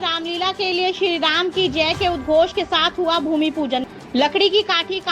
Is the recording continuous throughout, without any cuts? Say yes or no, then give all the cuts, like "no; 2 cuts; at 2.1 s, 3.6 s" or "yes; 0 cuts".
no; 1 cut; at 3.8 s